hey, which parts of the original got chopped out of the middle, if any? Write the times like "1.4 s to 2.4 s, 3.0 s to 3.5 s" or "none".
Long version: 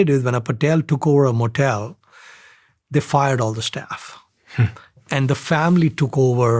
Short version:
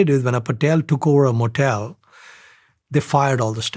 none